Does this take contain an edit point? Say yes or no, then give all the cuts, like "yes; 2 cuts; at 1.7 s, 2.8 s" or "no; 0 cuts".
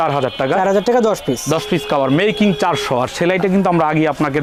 no; 0 cuts